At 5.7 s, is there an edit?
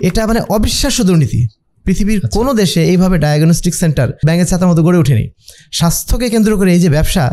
no; 1 cut; at 4.2 s

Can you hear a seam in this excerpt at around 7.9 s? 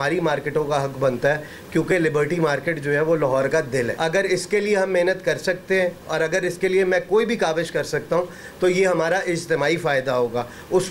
no; 1 cut; at 3.9 s

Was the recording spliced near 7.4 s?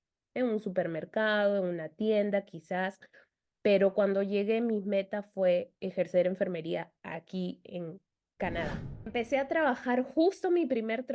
no; 1 cut; at 9.1 s

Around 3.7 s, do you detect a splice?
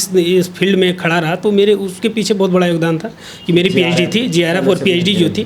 no; 0 cuts

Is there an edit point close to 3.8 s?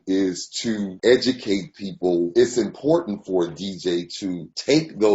no; 1 cut; at 2.3 s

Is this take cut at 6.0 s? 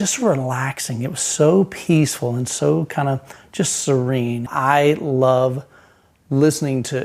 no; 1 cut; at 4.5 s

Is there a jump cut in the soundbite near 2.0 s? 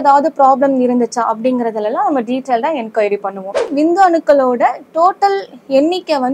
no; 1 cut; at 3.7 s

